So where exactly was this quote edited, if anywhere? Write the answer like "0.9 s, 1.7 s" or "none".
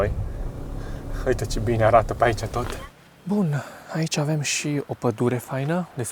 3.2 s